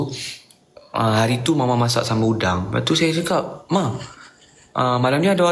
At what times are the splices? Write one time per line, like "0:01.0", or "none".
none